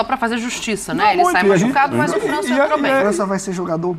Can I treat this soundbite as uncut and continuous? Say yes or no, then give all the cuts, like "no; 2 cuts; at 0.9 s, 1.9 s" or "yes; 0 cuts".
yes; 0 cuts